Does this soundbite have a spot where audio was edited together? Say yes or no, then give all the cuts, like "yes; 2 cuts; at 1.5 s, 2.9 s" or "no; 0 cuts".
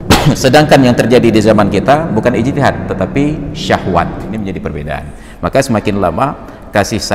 yes; 1 cut; at 4.4 s